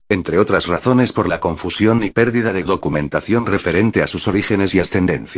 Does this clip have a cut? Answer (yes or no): no